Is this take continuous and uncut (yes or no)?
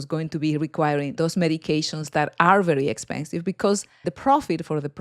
no